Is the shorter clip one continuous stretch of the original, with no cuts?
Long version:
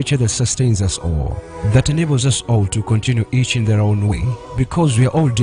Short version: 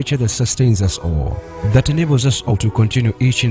no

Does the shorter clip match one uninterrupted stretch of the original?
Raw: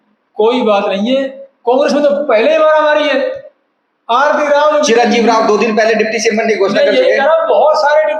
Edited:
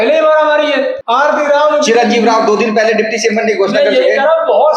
no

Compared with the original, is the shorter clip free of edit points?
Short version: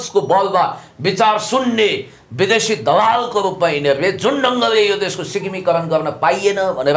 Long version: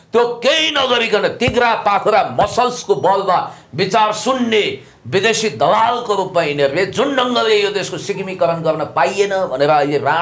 yes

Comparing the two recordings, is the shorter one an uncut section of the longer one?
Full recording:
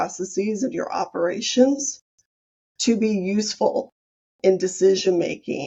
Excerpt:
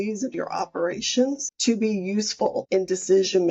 no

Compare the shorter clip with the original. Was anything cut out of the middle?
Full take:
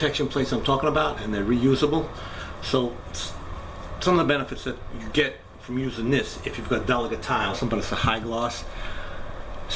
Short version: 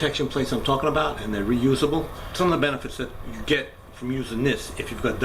yes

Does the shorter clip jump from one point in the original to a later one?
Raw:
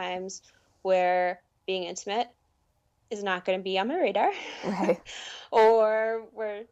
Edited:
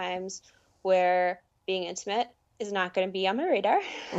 yes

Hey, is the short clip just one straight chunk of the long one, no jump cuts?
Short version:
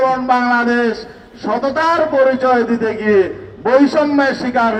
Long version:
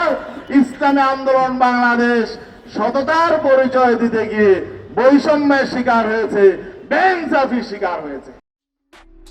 yes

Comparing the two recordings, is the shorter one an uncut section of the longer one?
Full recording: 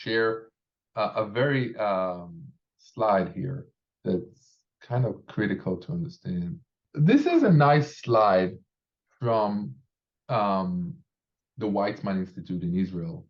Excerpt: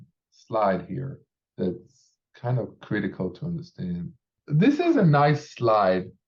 yes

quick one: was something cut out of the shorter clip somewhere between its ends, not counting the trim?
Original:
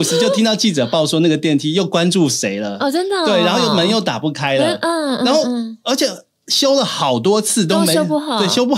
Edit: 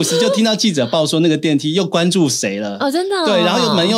no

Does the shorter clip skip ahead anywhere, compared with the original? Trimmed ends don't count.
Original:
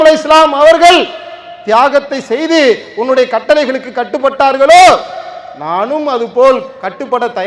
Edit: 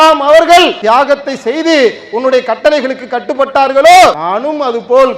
yes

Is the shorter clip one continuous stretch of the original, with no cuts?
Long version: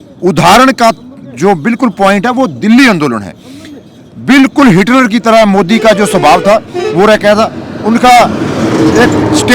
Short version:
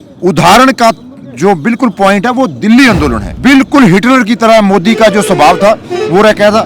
no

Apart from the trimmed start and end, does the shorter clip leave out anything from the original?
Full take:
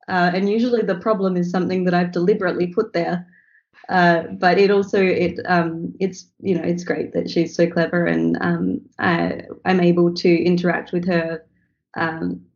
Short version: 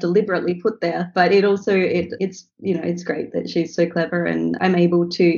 yes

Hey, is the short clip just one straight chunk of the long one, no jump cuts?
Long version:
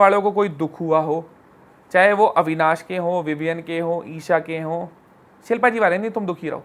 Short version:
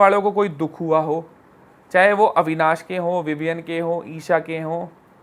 yes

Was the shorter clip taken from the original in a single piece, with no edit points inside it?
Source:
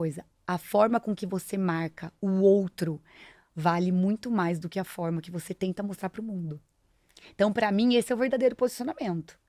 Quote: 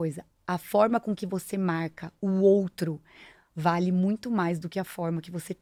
yes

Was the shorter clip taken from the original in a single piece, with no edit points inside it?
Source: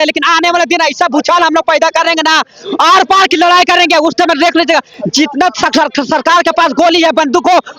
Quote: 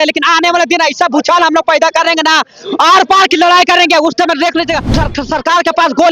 no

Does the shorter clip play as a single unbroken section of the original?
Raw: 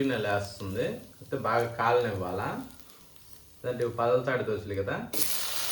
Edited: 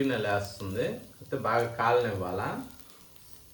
yes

